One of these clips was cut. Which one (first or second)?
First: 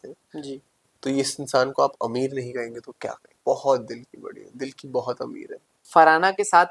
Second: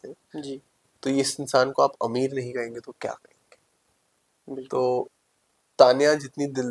first